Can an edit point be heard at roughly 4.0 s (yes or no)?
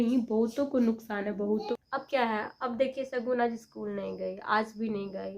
no